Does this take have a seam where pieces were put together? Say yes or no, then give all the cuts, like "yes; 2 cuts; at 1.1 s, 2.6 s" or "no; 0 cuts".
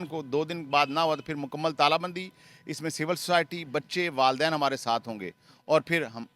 no; 0 cuts